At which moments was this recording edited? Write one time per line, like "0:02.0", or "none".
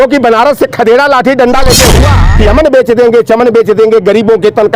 0:02.2